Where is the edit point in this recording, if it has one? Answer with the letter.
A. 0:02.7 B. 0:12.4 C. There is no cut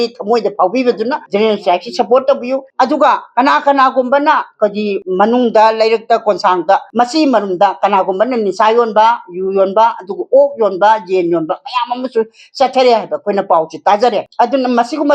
A